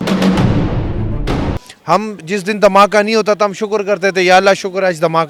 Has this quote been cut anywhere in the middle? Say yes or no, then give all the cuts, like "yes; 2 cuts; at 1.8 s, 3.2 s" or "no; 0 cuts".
no; 0 cuts